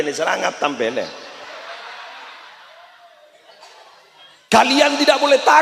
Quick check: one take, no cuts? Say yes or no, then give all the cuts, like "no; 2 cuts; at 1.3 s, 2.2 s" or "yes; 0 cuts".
no; 1 cut; at 4.5 s